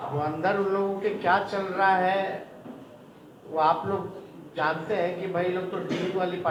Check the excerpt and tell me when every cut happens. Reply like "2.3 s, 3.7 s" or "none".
none